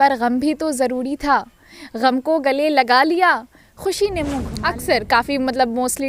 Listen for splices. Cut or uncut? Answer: cut